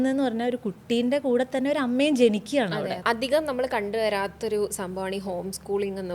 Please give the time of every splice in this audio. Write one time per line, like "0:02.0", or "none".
0:03.0